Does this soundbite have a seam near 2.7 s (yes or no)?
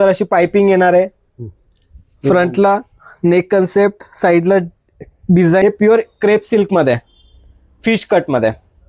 no